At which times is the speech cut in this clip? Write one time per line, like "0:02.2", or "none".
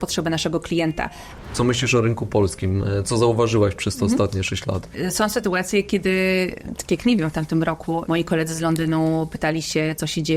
0:01.4
0:05.0
0:08.0